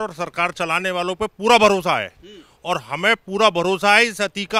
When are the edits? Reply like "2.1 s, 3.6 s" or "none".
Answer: none